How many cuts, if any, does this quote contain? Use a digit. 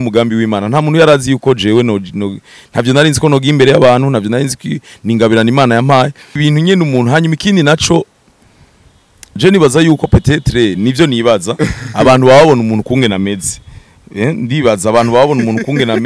1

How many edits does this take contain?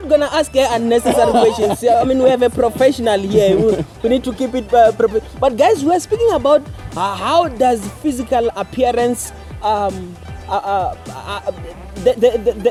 0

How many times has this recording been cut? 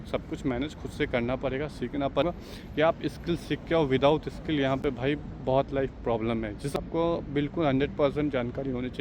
2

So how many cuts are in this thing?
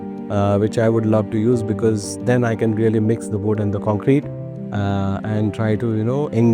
0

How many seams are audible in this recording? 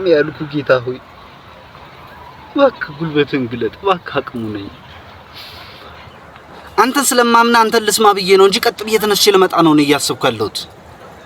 1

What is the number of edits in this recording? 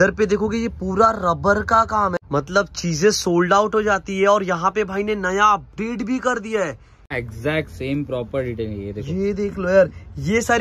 2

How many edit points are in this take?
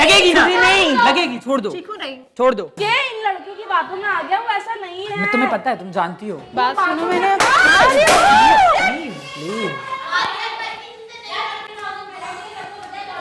1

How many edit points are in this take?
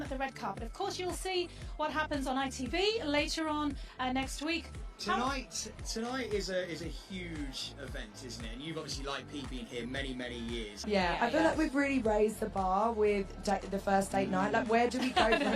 0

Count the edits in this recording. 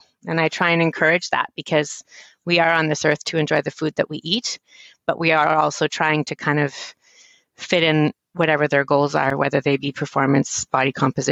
0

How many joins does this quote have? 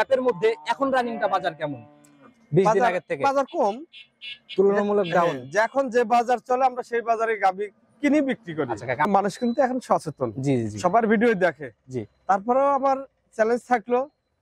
1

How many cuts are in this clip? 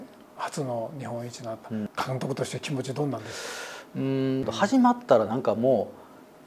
2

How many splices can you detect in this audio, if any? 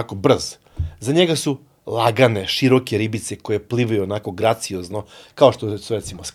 0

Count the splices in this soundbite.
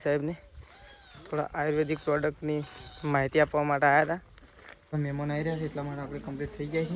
1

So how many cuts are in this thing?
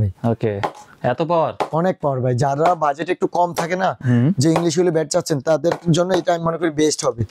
0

